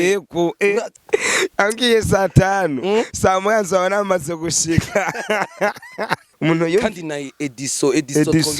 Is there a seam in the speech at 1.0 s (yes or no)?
yes